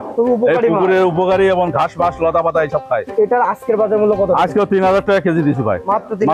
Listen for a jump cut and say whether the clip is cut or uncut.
cut